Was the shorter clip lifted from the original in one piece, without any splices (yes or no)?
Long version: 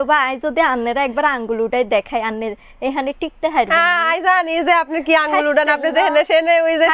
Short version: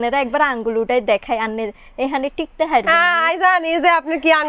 yes